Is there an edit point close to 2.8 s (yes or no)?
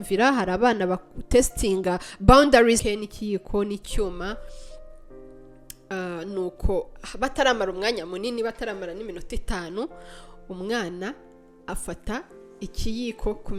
yes